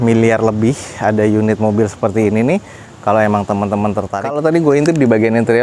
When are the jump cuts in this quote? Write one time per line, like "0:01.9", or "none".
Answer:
0:04.1